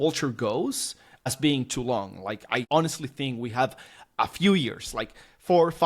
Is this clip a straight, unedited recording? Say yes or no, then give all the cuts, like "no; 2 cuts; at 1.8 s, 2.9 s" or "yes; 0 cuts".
no; 2 cuts; at 1.3 s, 2.7 s